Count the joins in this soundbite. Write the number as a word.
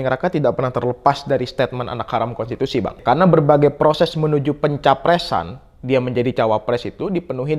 one